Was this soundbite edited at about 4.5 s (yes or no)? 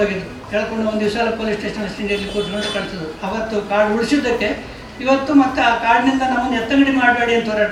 no